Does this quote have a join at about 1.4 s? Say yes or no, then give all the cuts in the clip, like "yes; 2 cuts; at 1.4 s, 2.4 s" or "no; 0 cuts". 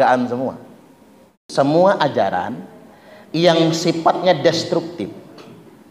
yes; 1 cut; at 1.4 s